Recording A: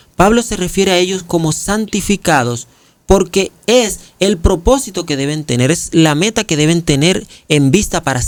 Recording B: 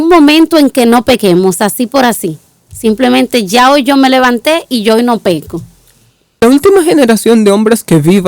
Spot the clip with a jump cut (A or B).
B